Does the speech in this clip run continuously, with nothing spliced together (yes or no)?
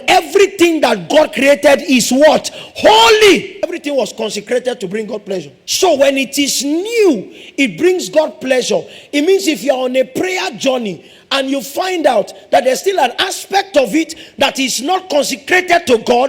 no